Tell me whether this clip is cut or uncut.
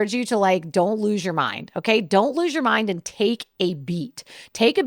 uncut